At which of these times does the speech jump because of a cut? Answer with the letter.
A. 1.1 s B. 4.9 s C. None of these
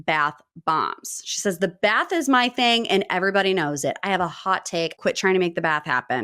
B